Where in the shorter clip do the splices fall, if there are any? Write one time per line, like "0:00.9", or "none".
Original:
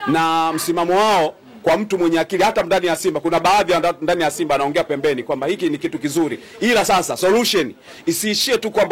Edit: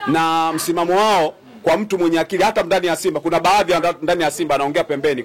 none